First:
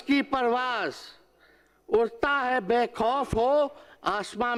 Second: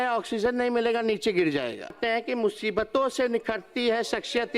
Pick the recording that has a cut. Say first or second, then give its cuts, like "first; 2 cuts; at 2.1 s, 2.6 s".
second; 1 cut; at 1.9 s